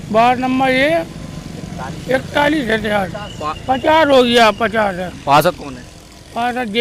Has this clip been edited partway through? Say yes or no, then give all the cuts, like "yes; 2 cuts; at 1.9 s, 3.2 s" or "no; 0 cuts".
no; 0 cuts